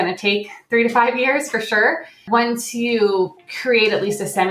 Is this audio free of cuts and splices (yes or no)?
no